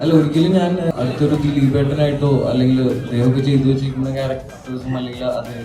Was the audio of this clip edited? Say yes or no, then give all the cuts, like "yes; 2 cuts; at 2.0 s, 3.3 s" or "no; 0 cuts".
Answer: yes; 2 cuts; at 0.9 s, 3.1 s